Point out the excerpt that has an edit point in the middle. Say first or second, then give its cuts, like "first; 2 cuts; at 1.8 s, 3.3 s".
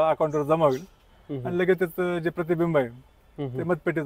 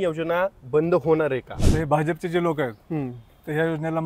second; 1 cut; at 1.6 s